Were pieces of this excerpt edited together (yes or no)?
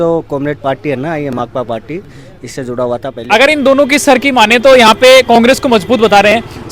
yes